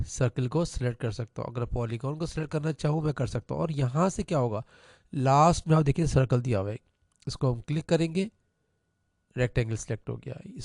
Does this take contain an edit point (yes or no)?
no